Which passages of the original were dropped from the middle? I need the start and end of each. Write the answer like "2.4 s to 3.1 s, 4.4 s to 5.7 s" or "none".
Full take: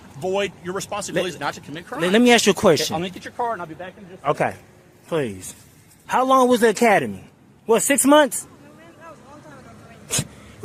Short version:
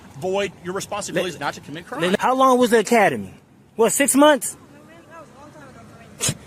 2.2 s to 6.1 s